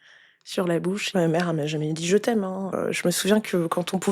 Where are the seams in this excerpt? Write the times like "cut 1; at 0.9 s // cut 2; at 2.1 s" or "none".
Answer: cut 1; at 1.0 s // cut 2; at 2.7 s